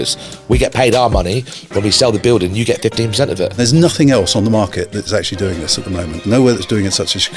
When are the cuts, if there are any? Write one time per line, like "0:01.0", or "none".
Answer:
0:03.5
0:06.2